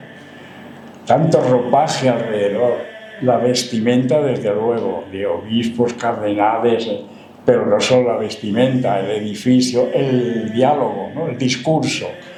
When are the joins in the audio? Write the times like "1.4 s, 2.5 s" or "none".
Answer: none